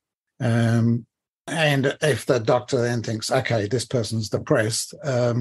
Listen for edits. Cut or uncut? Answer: cut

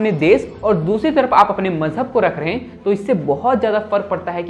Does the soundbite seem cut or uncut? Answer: uncut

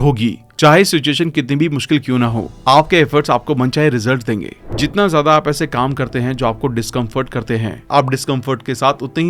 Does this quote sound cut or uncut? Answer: cut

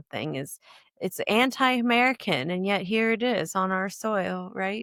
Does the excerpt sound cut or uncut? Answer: uncut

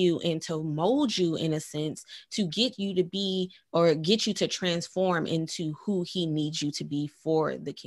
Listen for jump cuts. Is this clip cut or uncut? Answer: uncut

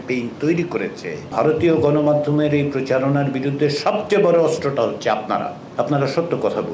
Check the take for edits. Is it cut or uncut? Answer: cut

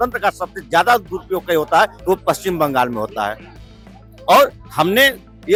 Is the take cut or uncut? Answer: uncut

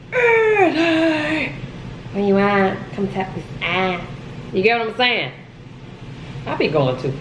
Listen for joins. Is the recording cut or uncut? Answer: uncut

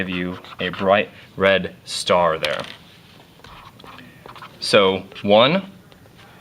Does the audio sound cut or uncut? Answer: cut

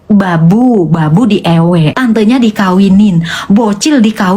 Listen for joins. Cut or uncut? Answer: cut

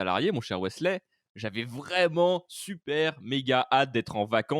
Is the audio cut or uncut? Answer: uncut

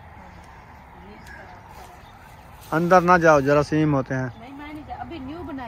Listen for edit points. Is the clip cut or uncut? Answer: uncut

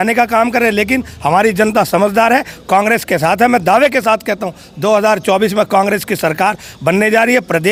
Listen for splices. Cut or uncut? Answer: uncut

